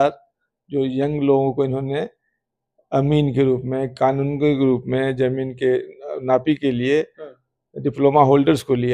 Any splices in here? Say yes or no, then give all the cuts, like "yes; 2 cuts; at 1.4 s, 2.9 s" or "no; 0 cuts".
no; 0 cuts